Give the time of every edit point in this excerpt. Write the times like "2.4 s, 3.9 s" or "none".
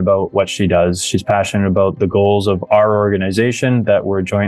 none